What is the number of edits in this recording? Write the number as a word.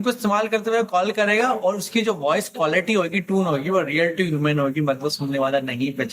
zero